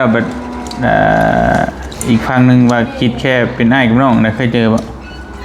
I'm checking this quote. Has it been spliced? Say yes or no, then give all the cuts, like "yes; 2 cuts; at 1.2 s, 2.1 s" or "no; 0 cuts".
no; 0 cuts